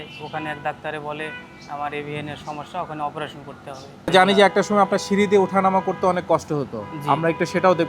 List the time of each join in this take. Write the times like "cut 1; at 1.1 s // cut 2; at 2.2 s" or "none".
cut 1; at 4.1 s